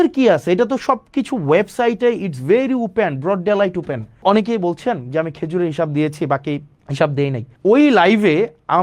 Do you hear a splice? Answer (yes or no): yes